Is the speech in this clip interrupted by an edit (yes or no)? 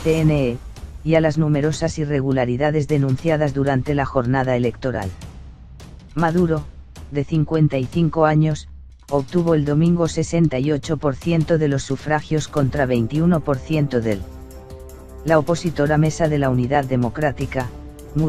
yes